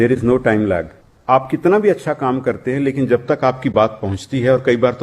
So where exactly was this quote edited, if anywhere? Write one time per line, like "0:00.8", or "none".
0:01.1